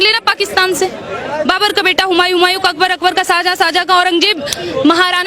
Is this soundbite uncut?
no; 1 cut; at 1.4 s

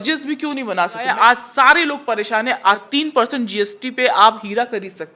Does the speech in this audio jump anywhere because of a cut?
yes; 2 cuts; at 1.1 s, 2.9 s

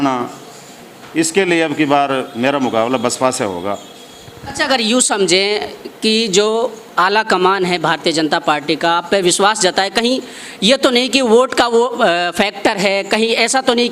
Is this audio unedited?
yes; 0 cuts

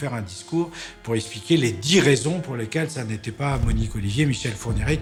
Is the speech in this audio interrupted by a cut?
no; 0 cuts

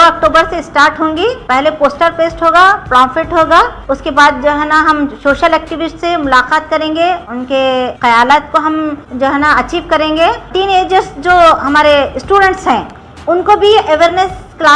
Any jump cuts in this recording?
yes; 5 cuts; at 1.4 s, 3.8 s, 7.7 s, 9.0 s, 10.5 s

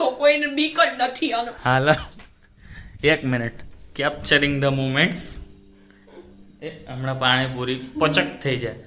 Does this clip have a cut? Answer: no; 0 cuts

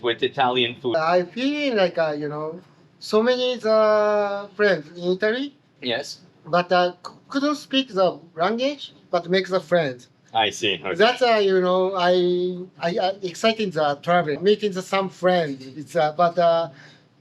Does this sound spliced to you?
yes; 2 cuts; at 0.9 s, 14.4 s

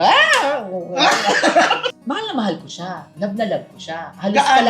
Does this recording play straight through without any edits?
no; 1 cut; at 1.9 s

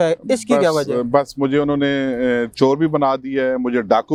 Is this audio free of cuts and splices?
yes; 0 cuts

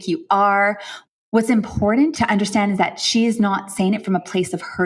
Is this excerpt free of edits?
no; 2 cuts; at 0.9 s, 2.1 s

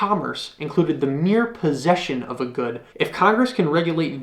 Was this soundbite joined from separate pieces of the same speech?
yes; 1 cut; at 2.8 s

